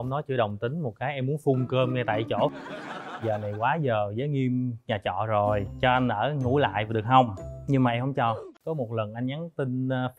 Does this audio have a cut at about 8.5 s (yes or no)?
yes